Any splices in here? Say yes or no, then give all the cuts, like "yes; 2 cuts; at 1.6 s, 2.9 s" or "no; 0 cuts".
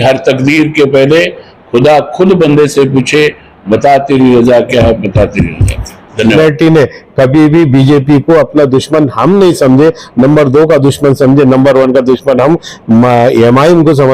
yes; 1 cut; at 6.4 s